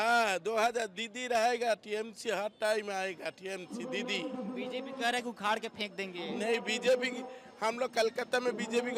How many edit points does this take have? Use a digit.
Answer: 0